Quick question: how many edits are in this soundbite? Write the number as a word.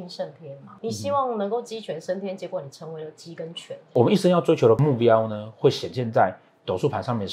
one